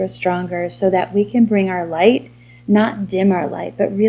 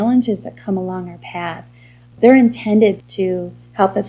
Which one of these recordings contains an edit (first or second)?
second